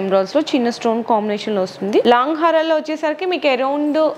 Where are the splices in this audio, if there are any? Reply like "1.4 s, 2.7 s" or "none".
2.0 s